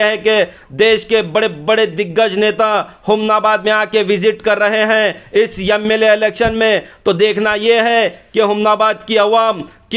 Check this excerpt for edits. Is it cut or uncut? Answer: uncut